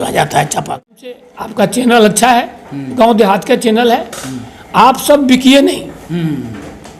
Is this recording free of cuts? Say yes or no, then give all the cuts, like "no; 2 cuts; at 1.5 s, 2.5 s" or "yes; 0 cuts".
no; 1 cut; at 1.3 s